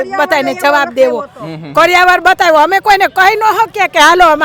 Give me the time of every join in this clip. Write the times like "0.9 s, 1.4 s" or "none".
none